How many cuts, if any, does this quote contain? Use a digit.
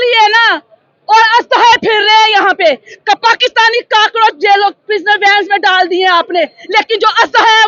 0